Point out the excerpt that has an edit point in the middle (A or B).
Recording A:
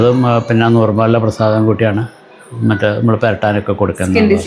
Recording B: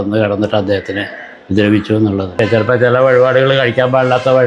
B